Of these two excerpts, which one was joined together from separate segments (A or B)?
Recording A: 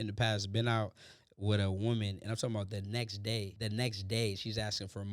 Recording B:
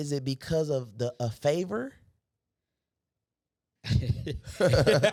A